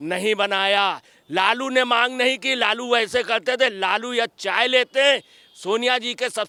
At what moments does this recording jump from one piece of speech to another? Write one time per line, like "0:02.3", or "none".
none